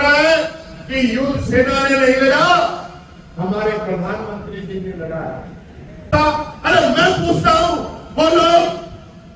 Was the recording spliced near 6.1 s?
yes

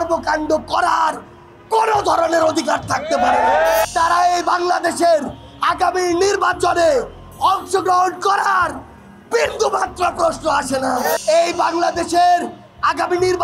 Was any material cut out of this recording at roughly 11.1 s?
yes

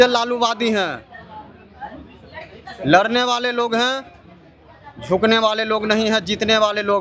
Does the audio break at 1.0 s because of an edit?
no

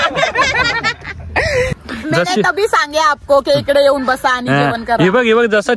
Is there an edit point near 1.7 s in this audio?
yes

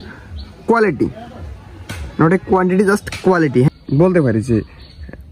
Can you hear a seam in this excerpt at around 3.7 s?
yes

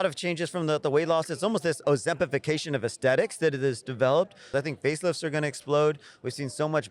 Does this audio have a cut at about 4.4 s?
yes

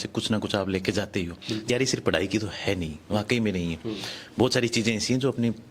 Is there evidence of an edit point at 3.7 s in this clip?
no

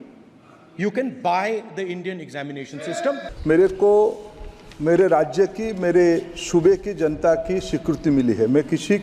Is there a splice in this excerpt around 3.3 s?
yes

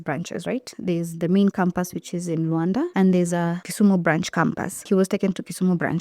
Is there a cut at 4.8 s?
yes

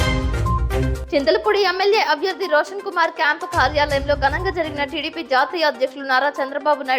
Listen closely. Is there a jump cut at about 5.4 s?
no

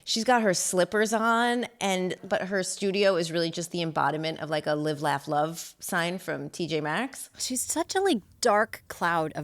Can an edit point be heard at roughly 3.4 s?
no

